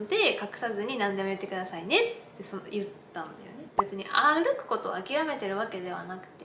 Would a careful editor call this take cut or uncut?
cut